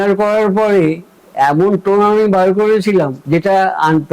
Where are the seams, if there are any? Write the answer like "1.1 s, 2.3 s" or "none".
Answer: 3.2 s